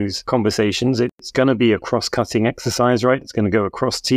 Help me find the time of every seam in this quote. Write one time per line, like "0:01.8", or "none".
0:01.2